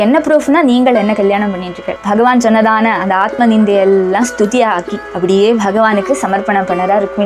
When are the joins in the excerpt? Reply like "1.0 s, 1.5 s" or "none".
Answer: 1.9 s